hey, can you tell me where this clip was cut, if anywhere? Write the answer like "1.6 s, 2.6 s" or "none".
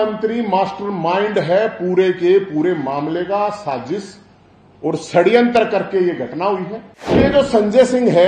7.2 s